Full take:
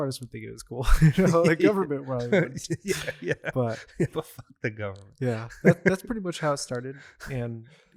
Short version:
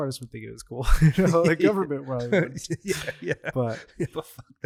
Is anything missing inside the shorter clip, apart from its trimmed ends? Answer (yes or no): no